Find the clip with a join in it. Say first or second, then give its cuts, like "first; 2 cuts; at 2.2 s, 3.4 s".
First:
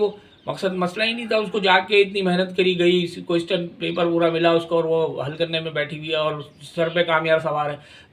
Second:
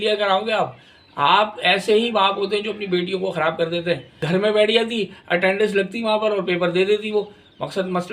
second; 1 cut; at 4.2 s